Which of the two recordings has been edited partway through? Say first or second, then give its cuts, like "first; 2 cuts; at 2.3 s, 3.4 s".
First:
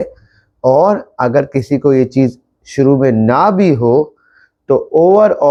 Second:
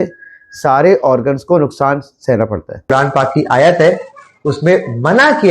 second; 1 cut; at 2.9 s